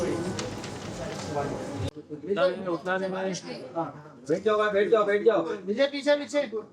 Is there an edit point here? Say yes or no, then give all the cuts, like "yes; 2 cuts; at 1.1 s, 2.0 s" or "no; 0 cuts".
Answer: no; 0 cuts